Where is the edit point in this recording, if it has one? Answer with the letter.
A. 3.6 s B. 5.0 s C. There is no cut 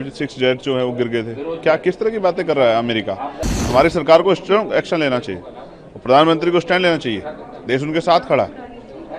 A